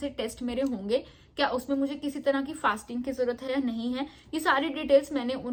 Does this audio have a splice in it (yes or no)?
no